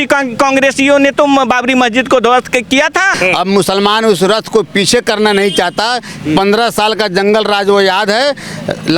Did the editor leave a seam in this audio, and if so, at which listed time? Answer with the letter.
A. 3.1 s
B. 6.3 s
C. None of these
A